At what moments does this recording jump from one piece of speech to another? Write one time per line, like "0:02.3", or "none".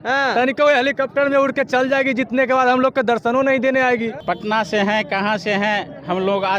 0:04.2